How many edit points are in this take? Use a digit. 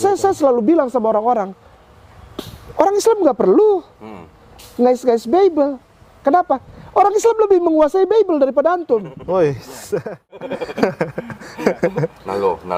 0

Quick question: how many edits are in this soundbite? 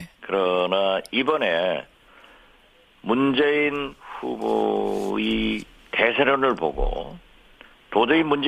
0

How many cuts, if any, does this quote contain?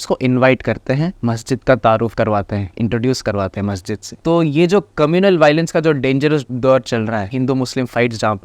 4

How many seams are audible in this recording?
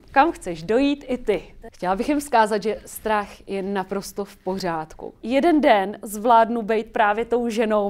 2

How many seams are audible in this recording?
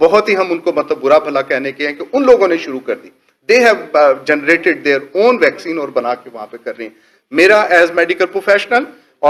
0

